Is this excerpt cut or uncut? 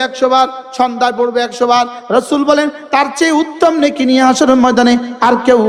uncut